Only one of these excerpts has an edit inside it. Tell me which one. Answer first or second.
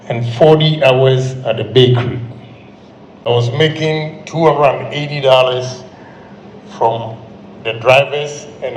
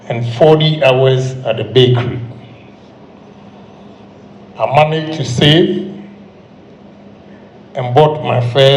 first